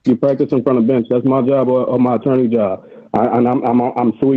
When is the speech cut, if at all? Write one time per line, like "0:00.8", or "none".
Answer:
none

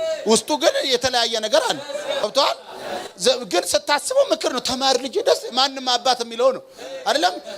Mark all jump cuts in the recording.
0:02.2

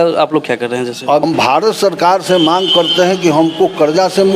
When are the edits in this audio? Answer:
0:01.2

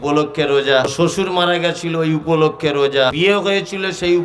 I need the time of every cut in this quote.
0:00.9
0:03.1

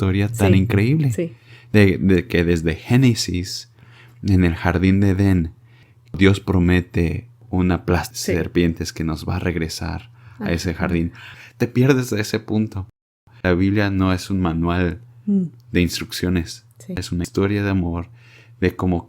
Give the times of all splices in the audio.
0:06.1
0:11.3
0:13.0
0:17.2

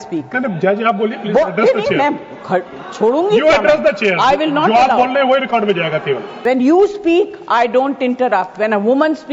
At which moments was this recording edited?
0:06.3

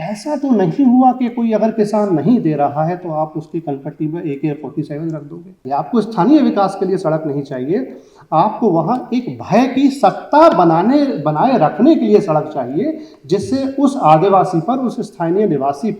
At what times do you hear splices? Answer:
0:05.6

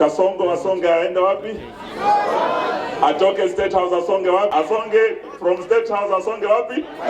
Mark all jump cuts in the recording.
0:04.5

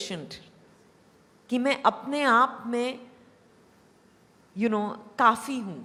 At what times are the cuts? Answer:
none

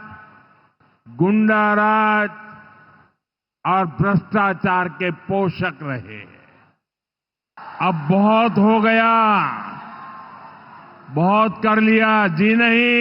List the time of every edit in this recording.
0:07.6

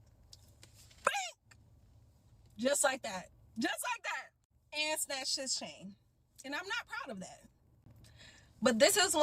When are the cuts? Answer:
none

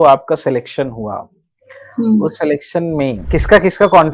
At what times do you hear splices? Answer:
0:03.2

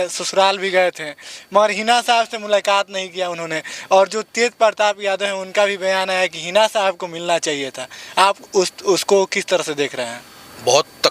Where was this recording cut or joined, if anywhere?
none

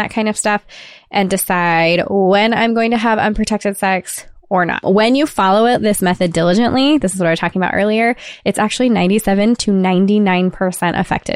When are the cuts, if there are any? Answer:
0:04.8

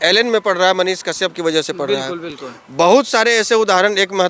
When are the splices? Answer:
none

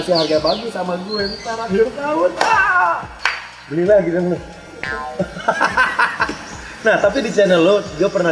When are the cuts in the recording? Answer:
none

